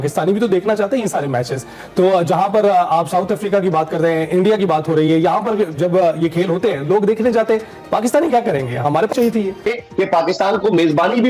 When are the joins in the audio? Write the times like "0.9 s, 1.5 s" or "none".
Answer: 9.7 s